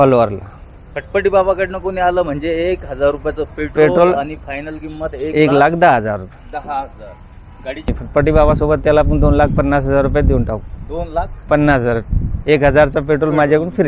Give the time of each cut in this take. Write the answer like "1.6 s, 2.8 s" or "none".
7.9 s